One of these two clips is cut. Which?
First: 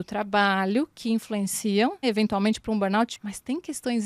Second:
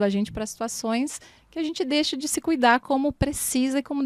first; 2 cuts; at 2.0 s, 3.1 s

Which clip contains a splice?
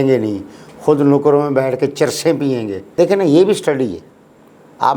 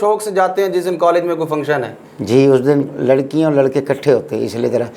first; 1 cut; at 2.9 s

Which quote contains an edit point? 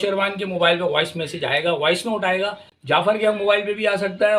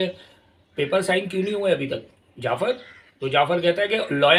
first; 1 cut; at 2.7 s

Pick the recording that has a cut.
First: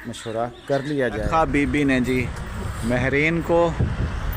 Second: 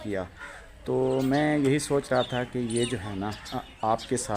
first; 1 cut; at 1.3 s

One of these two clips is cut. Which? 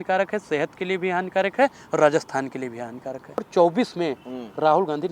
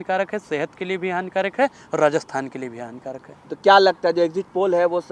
first; 1 cut; at 3.5 s

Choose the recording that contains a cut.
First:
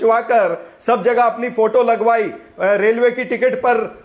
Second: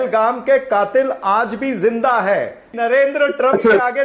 second; 1 cut; at 2.7 s

